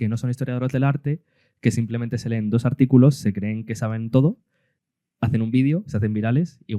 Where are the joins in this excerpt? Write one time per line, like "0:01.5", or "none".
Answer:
none